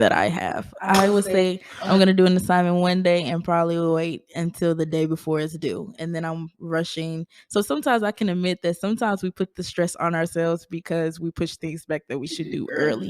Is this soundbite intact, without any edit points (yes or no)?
yes